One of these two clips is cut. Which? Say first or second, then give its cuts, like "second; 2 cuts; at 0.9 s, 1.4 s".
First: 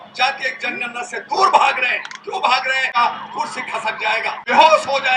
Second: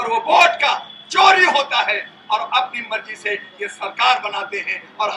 first; 2 cuts; at 2.9 s, 4.4 s